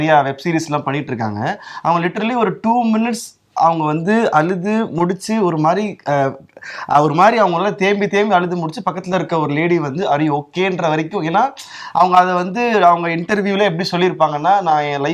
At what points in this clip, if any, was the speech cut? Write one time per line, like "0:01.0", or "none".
none